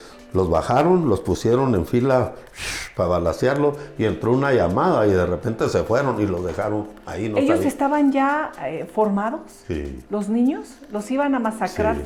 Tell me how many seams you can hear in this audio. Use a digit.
0